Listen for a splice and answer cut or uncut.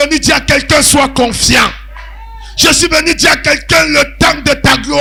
uncut